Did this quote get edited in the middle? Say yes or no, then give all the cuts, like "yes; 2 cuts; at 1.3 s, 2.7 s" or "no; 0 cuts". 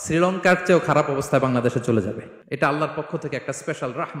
yes; 1 cut; at 2.3 s